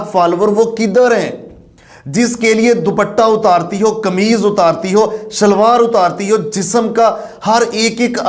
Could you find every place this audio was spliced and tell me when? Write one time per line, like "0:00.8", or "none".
none

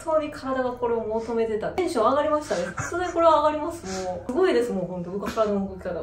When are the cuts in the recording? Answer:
0:01.8
0:04.3

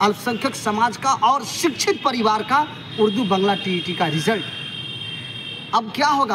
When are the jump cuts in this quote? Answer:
none

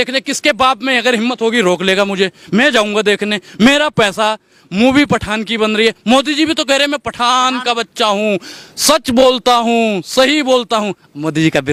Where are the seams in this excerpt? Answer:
none

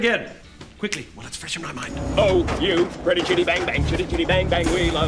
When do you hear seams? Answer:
0:02.0

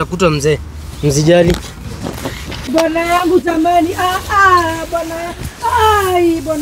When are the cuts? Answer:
0:02.7

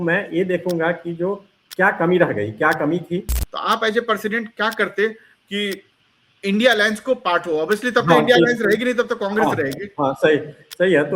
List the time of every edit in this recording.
0:03.5

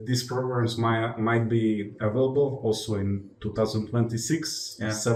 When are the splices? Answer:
none

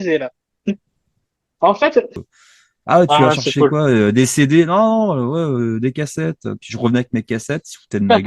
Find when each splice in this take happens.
0:02.3

